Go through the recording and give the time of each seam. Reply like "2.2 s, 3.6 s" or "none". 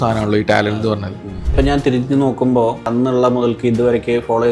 1.5 s, 2.9 s